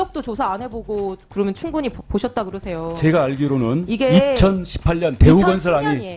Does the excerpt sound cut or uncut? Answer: uncut